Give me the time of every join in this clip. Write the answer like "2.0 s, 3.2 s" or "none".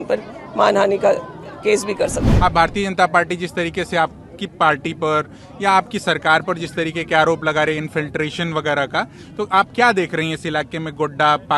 2.2 s